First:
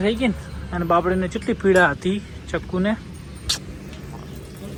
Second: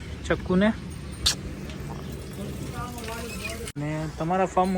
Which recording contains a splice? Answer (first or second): second